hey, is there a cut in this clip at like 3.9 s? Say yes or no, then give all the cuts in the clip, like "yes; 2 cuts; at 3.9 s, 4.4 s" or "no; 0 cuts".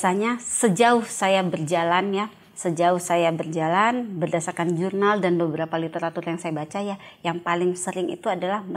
no; 0 cuts